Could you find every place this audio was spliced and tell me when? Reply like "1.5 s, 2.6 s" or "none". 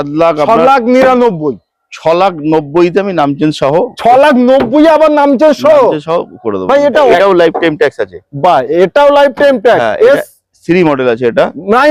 7.1 s